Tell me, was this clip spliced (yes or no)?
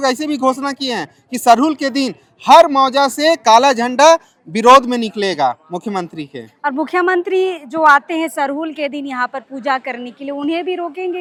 no